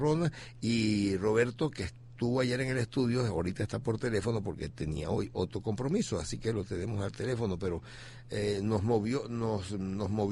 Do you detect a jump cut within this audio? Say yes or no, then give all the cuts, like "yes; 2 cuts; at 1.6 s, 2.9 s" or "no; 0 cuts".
yes; 1 cut; at 1.4 s